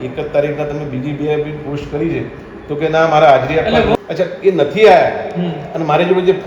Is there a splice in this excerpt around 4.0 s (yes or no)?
yes